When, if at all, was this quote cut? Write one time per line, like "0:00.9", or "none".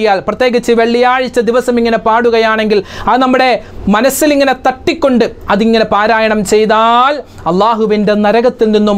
none